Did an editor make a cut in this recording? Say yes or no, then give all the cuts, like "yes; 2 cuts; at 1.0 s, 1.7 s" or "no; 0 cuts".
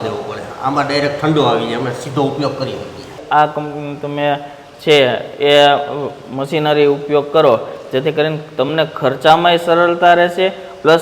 yes; 1 cut; at 3.2 s